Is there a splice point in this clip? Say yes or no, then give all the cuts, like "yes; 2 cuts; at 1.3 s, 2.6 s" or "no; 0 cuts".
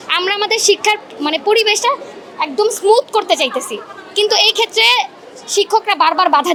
no; 0 cuts